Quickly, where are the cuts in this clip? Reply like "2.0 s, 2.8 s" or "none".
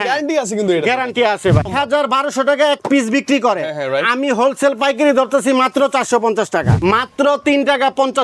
1.7 s, 6.8 s

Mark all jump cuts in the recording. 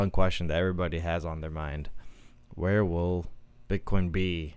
none

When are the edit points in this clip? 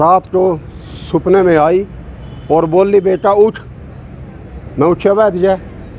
none

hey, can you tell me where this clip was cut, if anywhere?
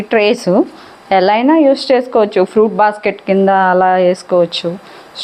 none

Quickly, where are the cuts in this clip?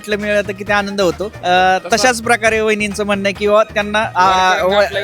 1.3 s, 4.1 s

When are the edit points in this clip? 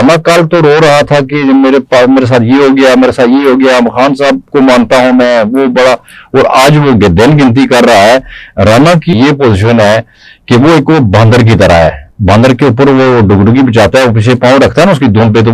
9.2 s

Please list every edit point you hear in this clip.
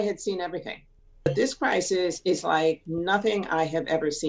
1.3 s

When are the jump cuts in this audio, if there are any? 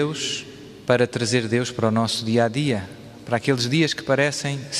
3.2 s

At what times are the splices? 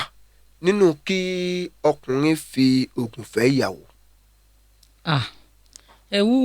none

